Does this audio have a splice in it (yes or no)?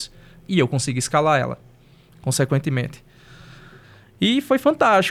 no